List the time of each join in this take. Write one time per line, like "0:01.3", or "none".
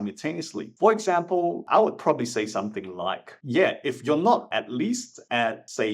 none